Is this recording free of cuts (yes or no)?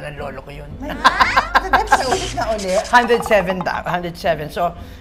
yes